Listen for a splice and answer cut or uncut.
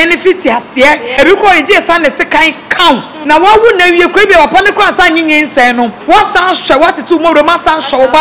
cut